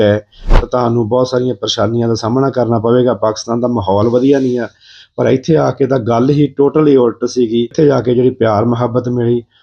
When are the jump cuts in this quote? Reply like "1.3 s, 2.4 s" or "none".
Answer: 7.7 s

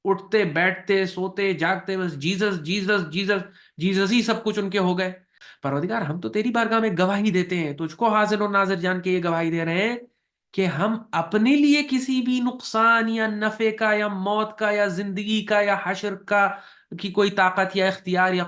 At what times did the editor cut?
5.4 s

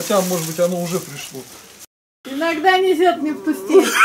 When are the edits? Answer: 2.1 s

